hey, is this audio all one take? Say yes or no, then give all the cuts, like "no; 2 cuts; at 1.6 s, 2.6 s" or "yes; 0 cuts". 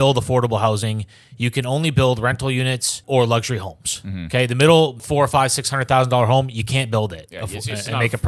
no; 2 cuts; at 3.0 s, 5.0 s